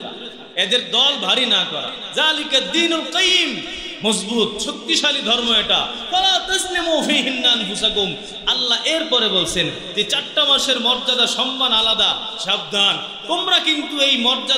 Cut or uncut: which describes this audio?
cut